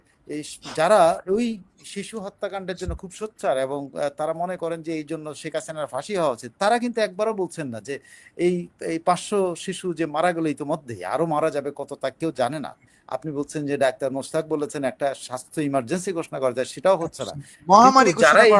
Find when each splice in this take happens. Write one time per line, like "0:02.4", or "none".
none

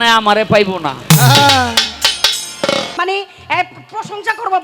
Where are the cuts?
0:02.9

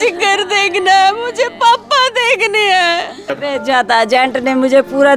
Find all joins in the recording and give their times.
0:03.3

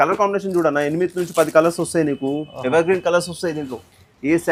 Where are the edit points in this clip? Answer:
none

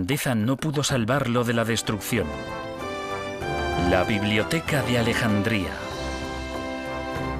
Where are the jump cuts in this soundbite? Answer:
none

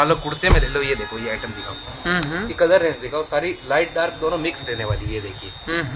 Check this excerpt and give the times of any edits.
none

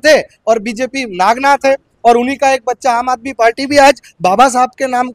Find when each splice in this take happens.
none

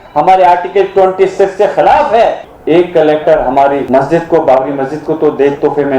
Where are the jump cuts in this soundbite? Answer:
0:02.5
0:03.9

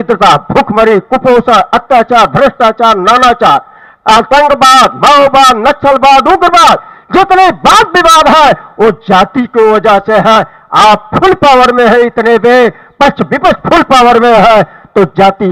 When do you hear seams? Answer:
none

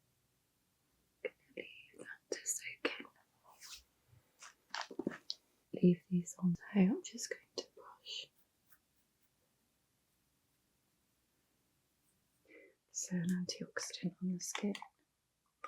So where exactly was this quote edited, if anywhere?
0:12.5

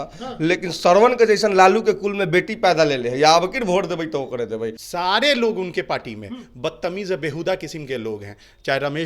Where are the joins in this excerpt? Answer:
0:04.8

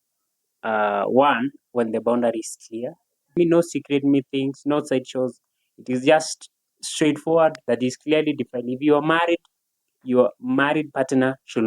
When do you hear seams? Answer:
0:03.4
0:07.6

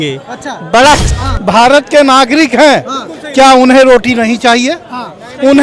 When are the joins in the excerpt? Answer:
0:01.0

